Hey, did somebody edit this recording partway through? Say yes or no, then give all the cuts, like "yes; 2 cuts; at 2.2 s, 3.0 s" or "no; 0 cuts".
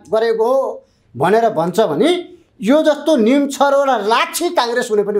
no; 0 cuts